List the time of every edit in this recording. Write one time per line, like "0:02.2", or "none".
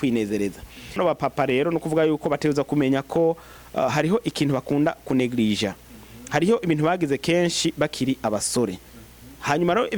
0:01.0